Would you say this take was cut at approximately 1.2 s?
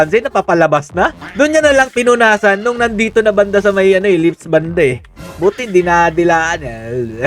yes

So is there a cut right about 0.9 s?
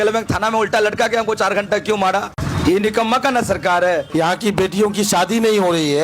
no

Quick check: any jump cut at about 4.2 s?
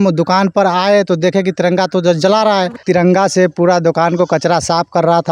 no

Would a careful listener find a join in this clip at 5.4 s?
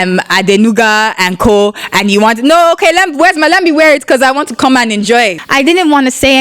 yes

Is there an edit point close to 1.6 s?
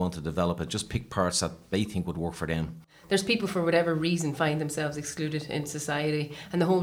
no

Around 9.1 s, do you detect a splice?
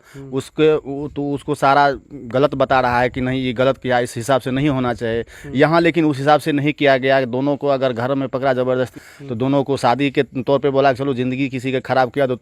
yes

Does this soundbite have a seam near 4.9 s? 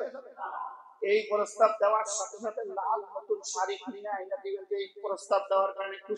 no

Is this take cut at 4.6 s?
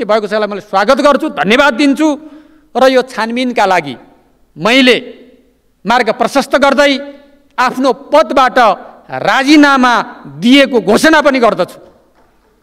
no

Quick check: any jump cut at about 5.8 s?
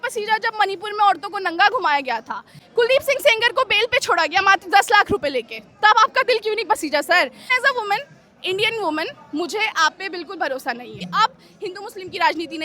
no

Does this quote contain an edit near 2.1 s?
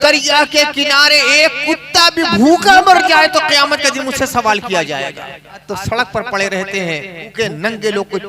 no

